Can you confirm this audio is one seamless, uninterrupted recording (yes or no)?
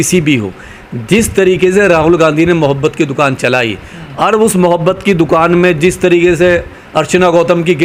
yes